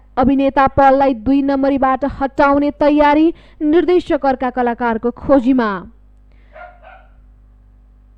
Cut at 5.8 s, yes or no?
no